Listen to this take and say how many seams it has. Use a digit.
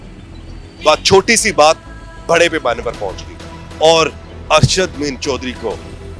0